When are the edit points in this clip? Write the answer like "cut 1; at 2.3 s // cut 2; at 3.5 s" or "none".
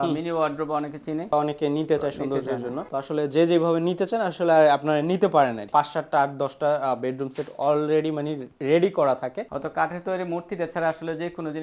cut 1; at 1.3 s // cut 2; at 5.7 s // cut 3; at 9.4 s